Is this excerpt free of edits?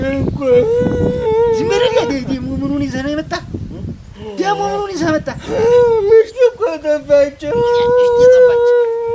yes; 0 cuts

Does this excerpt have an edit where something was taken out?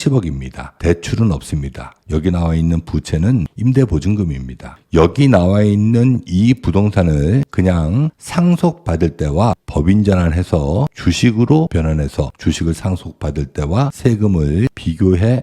yes; 1 cut; at 4.8 s

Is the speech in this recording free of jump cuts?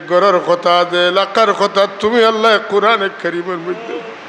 yes; 0 cuts

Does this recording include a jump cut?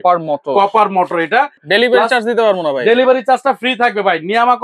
yes; 1 cut; at 1.6 s

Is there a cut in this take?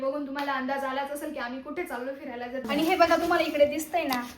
yes; 1 cut; at 2.7 s

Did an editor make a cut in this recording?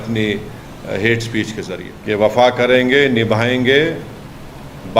yes; 1 cut; at 1.9 s

